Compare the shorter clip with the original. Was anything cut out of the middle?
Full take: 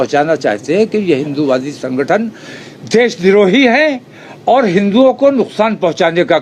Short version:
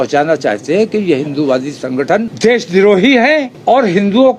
yes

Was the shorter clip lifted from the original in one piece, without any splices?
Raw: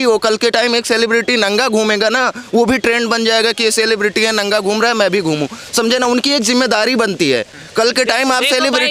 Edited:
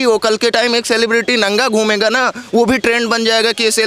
yes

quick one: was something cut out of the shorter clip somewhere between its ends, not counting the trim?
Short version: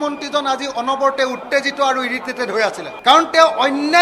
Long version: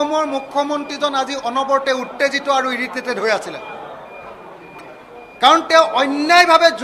yes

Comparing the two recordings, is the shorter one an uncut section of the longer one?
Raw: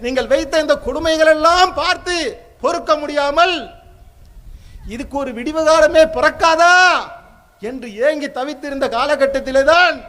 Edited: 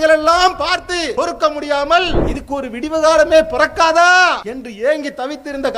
no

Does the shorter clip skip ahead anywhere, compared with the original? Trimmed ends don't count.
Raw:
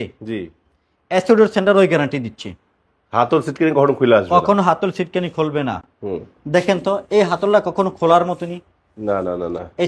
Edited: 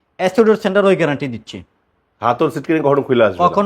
no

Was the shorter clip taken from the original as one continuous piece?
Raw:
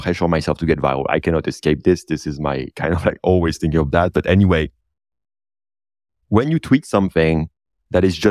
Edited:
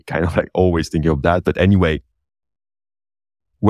yes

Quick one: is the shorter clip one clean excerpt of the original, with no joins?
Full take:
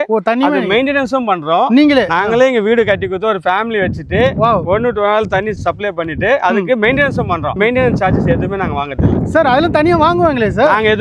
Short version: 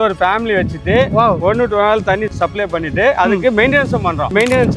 yes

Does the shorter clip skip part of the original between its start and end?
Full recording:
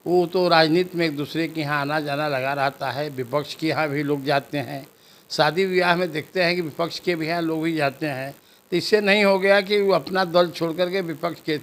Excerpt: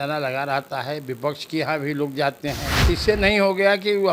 yes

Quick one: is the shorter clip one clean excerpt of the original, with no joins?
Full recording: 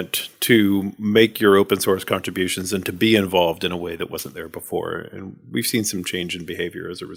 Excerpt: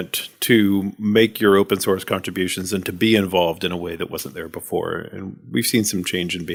yes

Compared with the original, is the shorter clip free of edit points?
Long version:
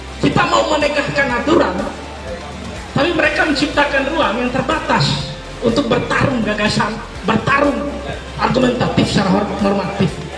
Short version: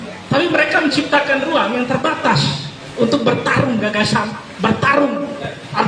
yes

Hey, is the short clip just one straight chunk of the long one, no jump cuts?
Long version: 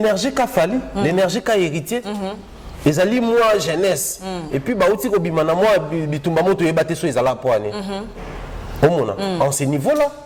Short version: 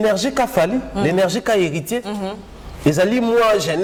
yes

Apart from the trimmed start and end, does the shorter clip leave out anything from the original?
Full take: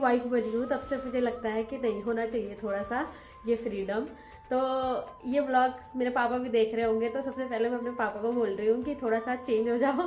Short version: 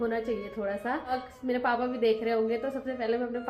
yes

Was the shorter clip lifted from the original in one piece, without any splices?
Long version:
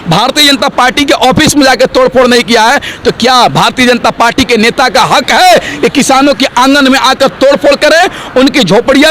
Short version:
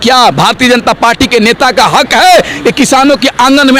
yes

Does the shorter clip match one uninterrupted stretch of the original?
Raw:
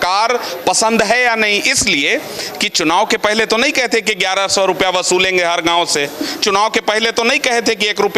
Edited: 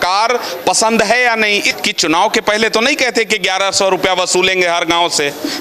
no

